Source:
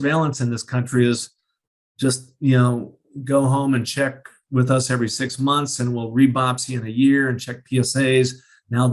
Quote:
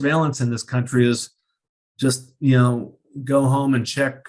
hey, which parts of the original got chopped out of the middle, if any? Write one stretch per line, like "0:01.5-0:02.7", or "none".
none